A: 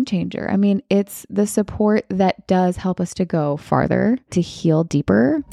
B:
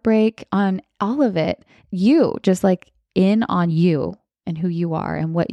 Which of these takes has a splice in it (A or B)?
A